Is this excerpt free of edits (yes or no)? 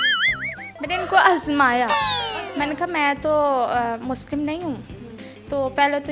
no